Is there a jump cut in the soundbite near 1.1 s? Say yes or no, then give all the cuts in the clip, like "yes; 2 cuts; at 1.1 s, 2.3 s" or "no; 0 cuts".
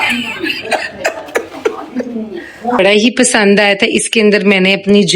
no; 1 cut; at 2.8 s